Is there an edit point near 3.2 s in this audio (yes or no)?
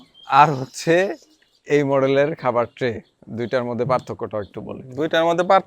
no